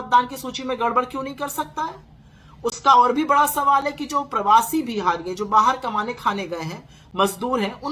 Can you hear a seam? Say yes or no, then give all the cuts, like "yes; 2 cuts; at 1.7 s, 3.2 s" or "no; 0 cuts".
no; 0 cuts